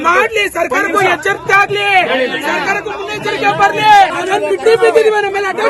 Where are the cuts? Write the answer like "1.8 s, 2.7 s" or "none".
4.2 s